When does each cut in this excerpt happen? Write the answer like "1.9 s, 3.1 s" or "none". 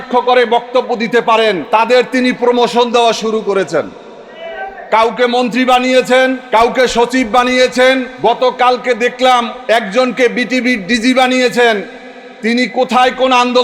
1.6 s, 6.4 s, 8.1 s, 9.6 s